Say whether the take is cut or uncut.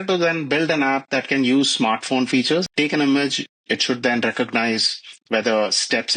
cut